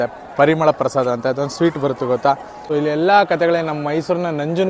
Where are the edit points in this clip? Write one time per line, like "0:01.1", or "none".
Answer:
0:02.5

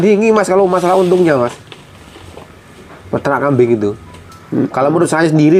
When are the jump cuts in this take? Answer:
none

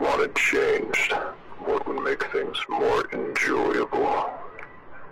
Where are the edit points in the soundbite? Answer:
0:01.4

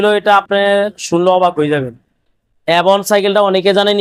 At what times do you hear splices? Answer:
none

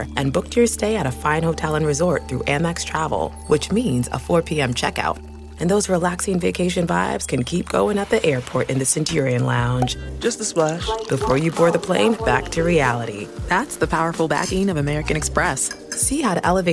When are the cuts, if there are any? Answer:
none

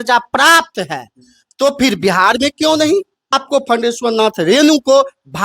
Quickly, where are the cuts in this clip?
0:03.4

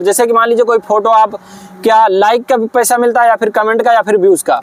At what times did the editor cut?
none

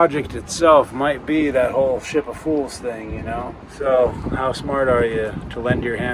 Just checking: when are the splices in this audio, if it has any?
0:03.7

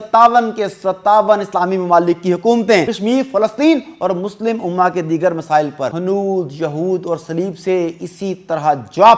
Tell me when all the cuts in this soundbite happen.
0:02.9
0:06.0

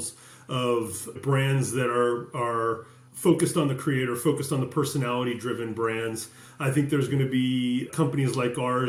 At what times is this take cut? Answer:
none

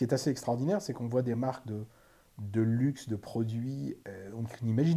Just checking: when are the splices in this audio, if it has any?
0:04.0

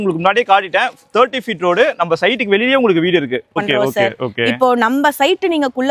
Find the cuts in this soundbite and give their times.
0:03.6

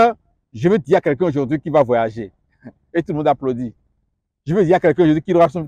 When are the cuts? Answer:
none

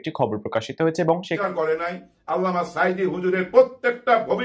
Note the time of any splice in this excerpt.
0:01.4

